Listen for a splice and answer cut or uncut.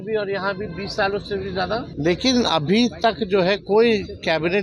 cut